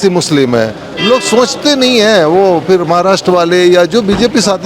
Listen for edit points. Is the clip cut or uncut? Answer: uncut